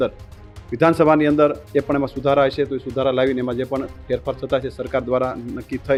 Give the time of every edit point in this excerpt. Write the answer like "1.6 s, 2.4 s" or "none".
none